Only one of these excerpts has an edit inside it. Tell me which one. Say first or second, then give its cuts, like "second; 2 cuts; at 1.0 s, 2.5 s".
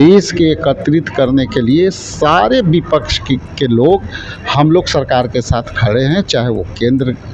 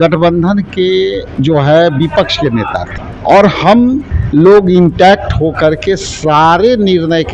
second; 3 cuts; at 1.3 s, 2.9 s, 4.1 s